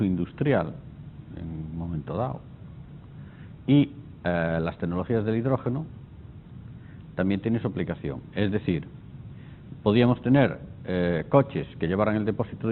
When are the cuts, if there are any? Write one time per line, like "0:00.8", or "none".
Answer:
0:01.6